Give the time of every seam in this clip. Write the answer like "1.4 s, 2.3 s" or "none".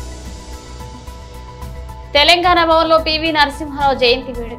1.6 s